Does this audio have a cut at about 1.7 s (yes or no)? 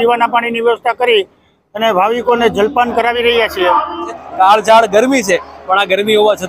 no